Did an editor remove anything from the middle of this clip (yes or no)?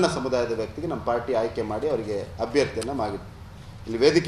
no